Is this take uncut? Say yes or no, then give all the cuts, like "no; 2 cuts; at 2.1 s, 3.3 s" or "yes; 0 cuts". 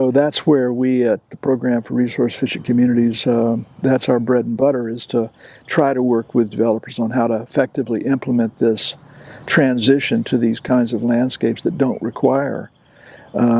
yes; 0 cuts